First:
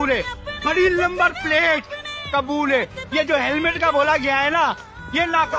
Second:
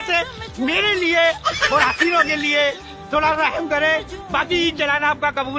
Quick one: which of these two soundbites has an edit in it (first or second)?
second